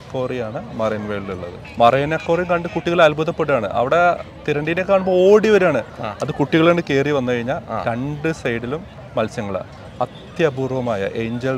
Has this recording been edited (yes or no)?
yes